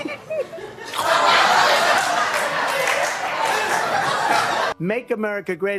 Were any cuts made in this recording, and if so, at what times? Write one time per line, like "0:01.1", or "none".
none